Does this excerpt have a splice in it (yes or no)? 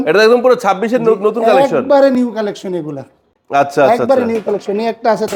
no